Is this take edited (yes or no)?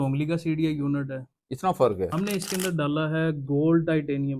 yes